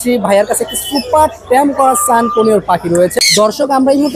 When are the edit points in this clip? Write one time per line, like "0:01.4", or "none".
0:03.1